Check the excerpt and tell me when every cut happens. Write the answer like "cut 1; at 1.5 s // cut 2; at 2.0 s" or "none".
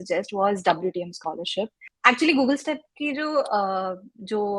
cut 1; at 1.8 s